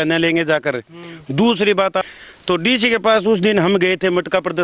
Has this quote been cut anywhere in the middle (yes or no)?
no